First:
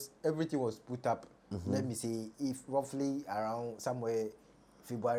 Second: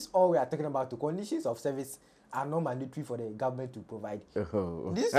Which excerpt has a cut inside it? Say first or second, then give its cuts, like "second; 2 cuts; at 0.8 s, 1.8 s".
second; 1 cut; at 4.2 s